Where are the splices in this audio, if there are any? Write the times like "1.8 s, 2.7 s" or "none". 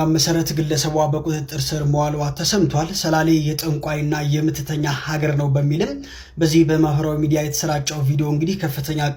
none